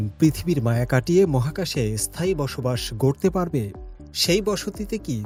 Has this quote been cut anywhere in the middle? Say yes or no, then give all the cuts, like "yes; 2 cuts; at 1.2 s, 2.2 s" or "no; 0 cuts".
no; 0 cuts